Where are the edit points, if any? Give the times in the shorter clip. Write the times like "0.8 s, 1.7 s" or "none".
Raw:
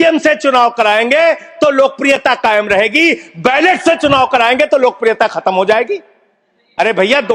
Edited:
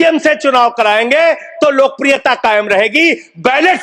none

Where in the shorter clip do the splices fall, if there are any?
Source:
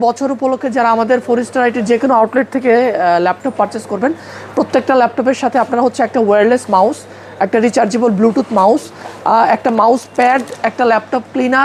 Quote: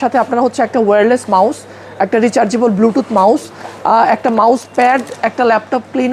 none

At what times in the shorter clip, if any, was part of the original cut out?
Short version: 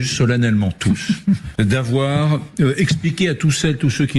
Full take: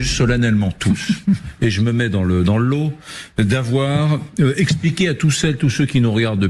1.5 s

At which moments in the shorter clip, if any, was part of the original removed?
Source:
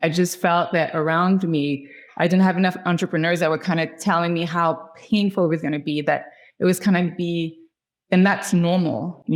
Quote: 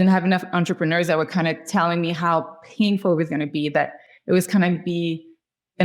none

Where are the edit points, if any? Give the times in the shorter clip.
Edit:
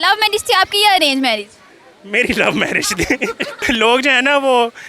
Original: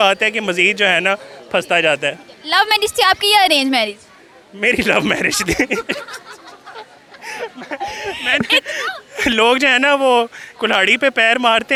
3.5 s

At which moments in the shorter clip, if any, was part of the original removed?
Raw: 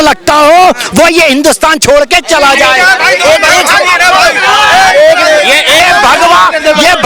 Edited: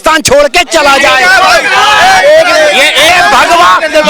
1.4 s

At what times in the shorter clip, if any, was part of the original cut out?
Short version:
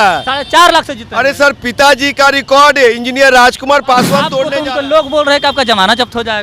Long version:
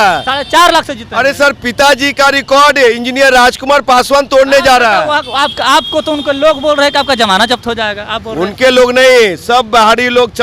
4.4 s

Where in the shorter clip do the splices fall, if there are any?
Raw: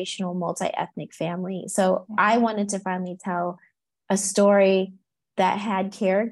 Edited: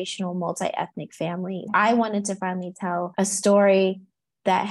1.6 s, 3.1 s

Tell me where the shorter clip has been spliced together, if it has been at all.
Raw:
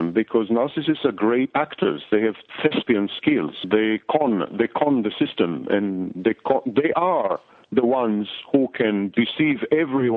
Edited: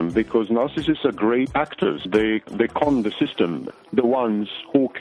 2.4 s, 3.6 s

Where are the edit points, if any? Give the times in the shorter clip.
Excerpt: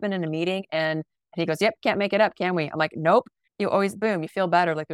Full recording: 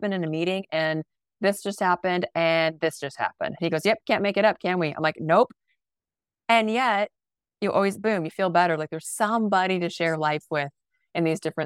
1.2 s, 3.4 s

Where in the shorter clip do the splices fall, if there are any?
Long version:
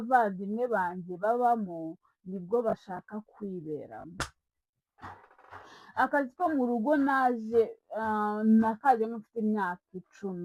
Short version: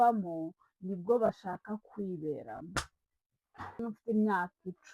3.8 s

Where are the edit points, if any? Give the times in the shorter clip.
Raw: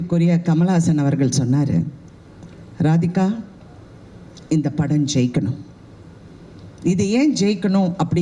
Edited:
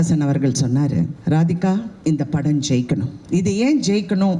1.2 s, 1.9 s, 3.2 s

